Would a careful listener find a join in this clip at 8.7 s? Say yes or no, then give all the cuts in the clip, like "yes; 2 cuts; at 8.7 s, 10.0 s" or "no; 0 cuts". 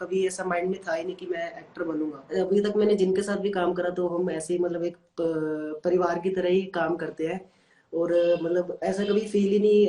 no; 1 cut; at 2.3 s